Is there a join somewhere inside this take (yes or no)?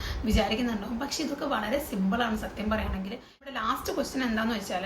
yes